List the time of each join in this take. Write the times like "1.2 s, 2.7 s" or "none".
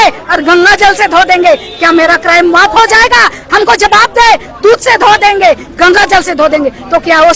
none